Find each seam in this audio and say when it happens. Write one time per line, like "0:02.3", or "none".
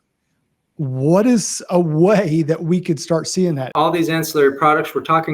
0:03.7